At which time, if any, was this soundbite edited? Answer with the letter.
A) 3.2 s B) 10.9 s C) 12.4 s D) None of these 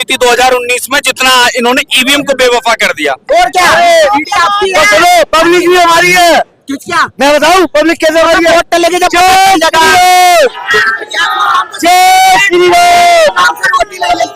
A